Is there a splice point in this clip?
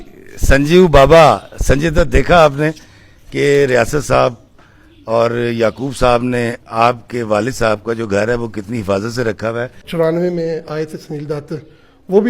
yes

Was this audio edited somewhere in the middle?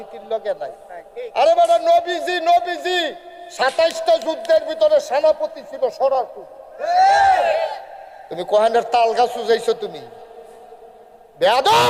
no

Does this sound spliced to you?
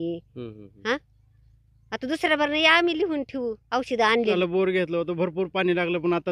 yes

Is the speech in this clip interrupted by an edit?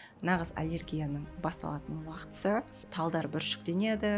yes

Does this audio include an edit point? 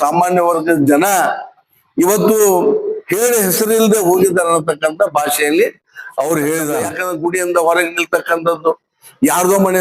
yes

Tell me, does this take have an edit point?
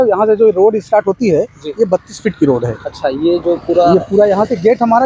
no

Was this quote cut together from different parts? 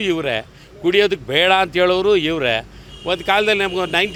no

